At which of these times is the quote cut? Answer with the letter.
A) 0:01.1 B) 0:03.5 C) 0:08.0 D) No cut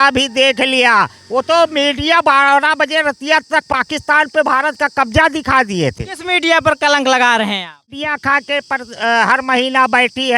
C